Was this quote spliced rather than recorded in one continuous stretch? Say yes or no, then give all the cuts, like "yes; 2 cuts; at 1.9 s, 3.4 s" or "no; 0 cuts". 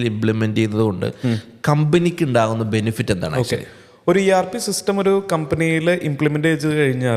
no; 0 cuts